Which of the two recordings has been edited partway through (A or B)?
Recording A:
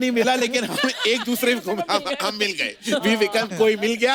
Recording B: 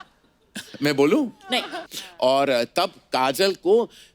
B